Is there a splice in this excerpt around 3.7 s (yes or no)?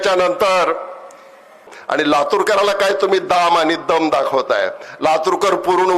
no